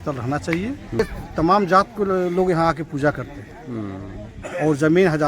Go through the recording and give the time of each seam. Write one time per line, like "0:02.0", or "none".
0:01.0